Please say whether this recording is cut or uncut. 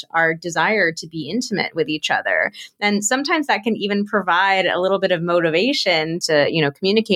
cut